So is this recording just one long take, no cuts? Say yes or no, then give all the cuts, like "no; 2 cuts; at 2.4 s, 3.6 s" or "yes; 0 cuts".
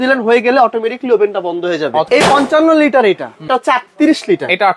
no; 2 cuts; at 2.1 s, 3.5 s